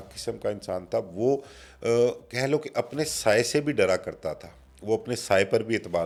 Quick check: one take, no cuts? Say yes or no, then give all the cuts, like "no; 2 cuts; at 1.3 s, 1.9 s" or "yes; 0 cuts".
yes; 0 cuts